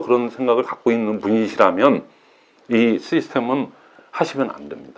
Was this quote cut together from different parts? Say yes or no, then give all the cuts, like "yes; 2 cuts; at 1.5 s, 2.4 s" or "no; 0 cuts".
no; 0 cuts